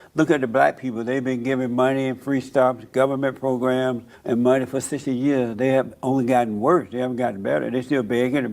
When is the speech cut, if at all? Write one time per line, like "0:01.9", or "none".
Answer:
0:04.1